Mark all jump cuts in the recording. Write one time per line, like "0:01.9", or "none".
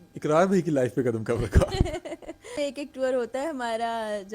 0:02.5